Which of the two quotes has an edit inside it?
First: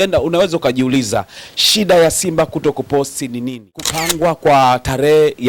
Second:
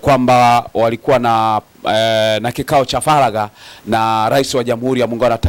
first; 1 cut; at 4.1 s

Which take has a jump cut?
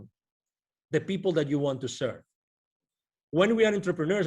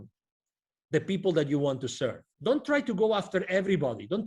second; 1 cut; at 2.3 s

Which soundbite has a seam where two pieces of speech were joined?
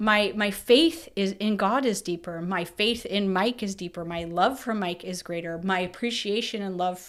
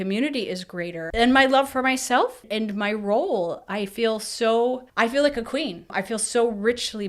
second; 4 cuts; at 1.0 s, 2.5 s, 4.9 s, 5.9 s

